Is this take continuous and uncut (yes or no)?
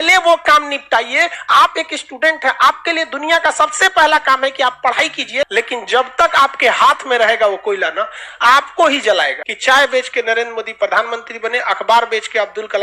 no